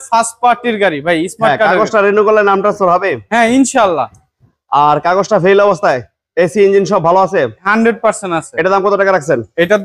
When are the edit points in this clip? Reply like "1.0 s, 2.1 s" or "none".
none